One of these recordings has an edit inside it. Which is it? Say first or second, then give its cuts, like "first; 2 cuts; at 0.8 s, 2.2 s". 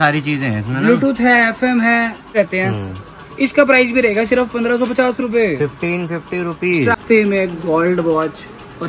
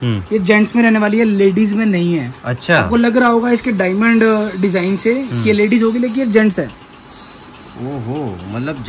first; 2 cuts; at 2.3 s, 7.0 s